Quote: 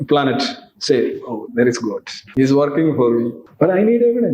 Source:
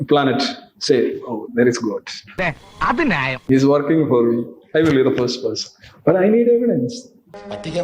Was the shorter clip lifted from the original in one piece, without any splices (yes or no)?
no